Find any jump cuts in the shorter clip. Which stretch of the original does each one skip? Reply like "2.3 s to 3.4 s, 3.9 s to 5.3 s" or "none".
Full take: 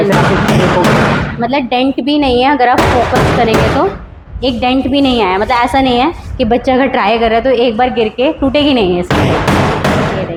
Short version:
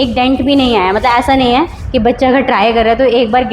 none